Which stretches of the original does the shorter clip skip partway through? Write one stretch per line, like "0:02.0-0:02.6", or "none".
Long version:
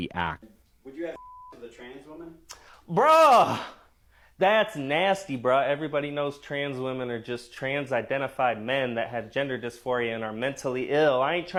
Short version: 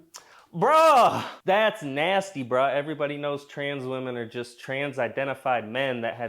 0:03.6-0:04.2